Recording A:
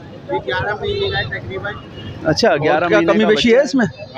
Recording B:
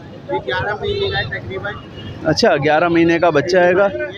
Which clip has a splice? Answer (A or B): A